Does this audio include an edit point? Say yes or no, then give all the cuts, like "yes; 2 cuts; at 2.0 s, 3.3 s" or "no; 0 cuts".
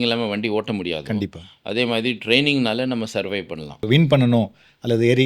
yes; 1 cut; at 3.9 s